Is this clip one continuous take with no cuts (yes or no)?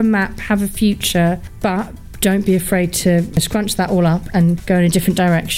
no